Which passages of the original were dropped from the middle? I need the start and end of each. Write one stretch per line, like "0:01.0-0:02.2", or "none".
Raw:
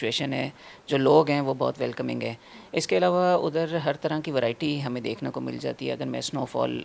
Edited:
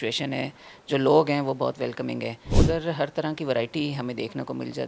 0:02.5-0:03.4

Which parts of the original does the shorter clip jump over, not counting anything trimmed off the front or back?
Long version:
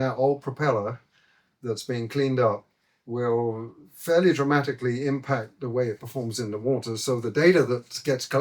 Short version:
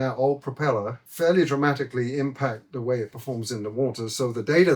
0:01.0-0:03.9

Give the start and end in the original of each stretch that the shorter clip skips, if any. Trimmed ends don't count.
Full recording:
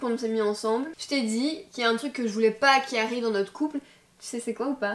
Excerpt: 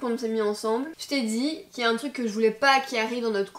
none

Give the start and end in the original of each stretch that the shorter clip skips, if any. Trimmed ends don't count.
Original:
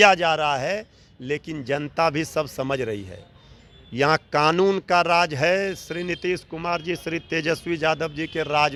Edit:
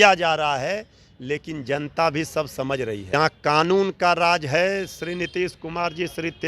0:03.1-0:04.0

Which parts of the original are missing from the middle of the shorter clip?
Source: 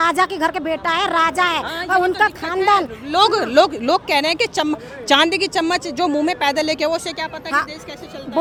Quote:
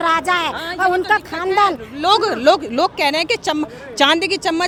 none

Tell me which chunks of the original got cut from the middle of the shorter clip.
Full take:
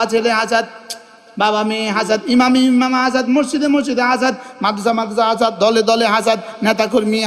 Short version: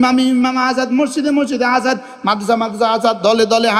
none

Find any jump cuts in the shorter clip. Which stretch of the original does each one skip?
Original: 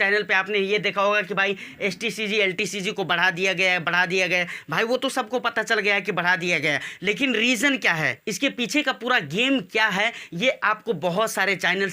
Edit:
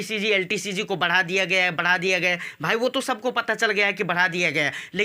none

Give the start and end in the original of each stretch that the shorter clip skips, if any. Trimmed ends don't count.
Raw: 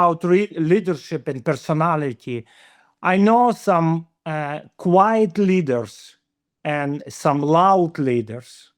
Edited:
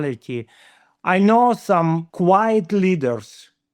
0:04.1-0:04.7

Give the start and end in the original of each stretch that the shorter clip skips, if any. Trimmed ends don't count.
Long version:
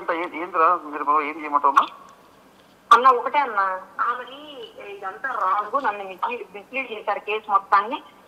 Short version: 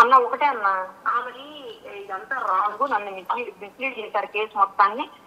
none

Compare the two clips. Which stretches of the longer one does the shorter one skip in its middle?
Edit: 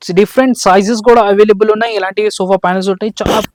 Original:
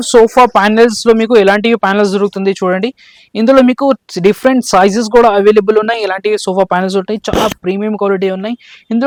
none

